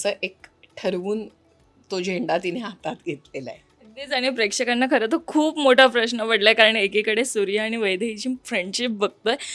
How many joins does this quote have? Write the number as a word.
zero